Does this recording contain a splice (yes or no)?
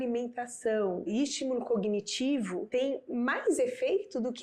yes